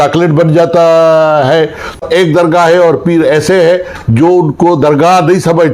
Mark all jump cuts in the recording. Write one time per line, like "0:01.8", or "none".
0:02.0